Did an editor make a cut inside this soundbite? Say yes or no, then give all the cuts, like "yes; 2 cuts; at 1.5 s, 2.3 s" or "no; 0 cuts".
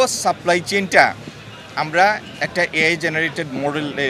no; 0 cuts